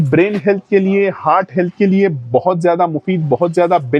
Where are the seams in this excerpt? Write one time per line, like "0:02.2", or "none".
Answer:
none